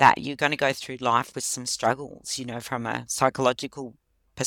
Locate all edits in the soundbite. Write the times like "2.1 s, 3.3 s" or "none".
none

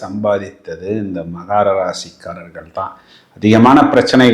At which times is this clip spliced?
none

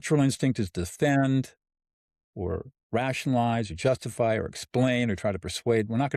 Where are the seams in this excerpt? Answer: none

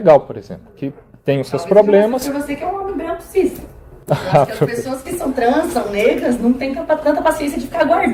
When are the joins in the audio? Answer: none

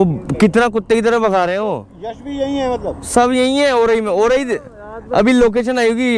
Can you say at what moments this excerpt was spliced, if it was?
none

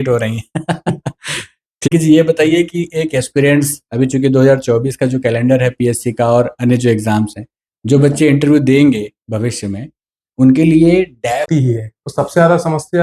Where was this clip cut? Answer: 1.9 s, 11.5 s

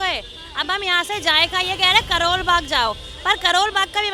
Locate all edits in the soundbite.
none

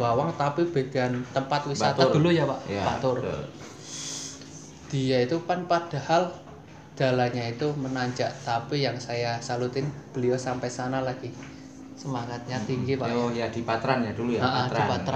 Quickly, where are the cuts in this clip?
none

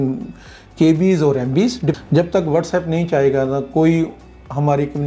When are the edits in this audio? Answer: 1.9 s

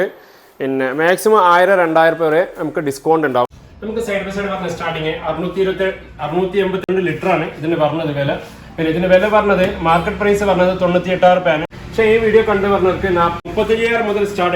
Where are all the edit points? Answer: 3.7 s, 11.7 s, 13.4 s

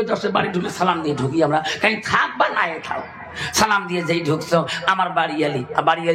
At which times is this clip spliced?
none

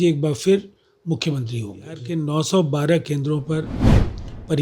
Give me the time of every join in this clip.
2.1 s

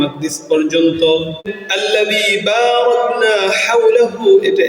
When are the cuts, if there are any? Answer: 1.6 s

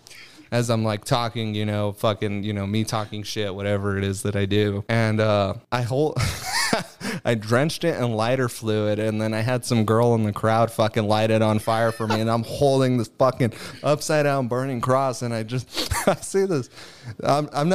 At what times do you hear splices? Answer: 4.8 s, 5.6 s

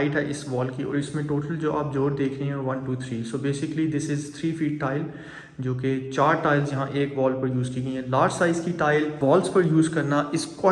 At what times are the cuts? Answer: 9.2 s

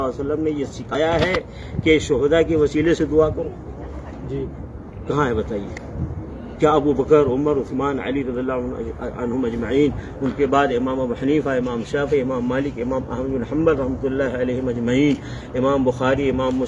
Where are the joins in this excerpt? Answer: 0.9 s

